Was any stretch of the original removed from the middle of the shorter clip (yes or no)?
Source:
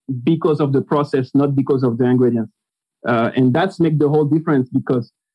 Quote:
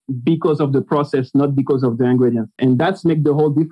yes